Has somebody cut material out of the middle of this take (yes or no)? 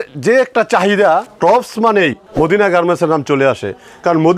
yes